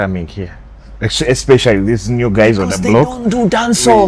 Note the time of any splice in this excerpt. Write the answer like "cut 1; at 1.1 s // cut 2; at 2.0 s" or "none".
none